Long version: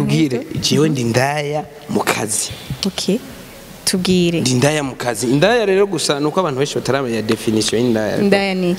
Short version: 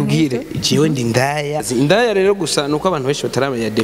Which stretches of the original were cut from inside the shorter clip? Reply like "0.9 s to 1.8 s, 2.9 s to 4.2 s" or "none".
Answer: 1.7 s to 5.2 s